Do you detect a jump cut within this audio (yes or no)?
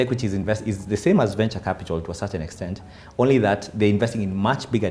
no